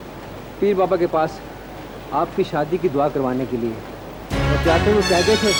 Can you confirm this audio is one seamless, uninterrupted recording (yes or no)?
yes